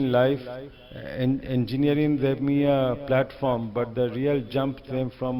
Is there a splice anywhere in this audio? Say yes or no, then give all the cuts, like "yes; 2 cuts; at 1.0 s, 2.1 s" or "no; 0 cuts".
no; 0 cuts